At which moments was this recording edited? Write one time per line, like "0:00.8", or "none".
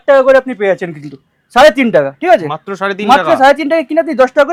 none